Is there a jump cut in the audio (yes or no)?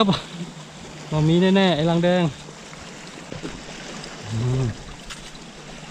yes